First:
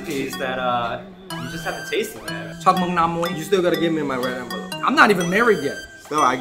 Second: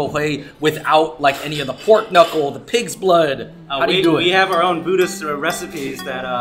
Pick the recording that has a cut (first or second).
first